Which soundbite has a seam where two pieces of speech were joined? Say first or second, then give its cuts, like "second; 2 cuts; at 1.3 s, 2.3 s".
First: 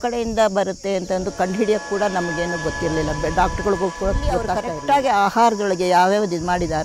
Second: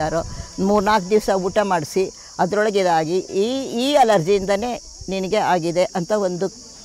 first; 1 cut; at 4.7 s